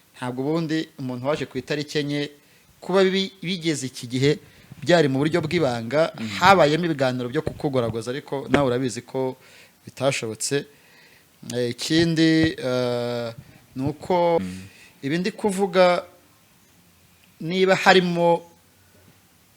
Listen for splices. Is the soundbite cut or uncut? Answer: cut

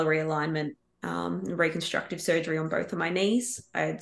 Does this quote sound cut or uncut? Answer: uncut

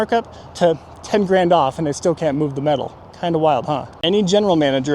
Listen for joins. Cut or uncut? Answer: cut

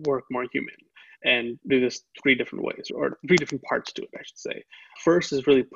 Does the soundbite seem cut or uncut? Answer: uncut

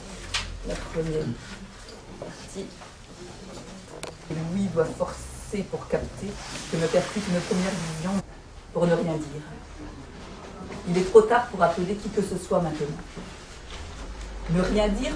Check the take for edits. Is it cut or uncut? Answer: uncut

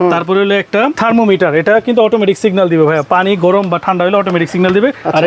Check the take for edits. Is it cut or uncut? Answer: uncut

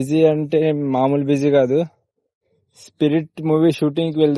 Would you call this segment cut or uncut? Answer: uncut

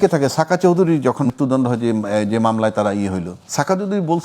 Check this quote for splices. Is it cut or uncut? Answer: cut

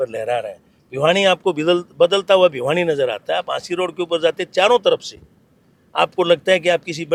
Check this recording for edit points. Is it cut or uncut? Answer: uncut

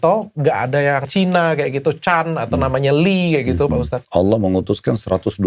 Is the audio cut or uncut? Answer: cut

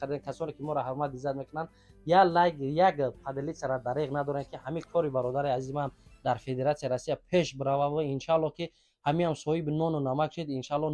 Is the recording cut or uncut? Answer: uncut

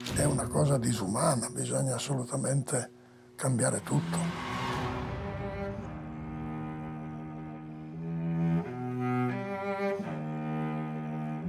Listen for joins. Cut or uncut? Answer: uncut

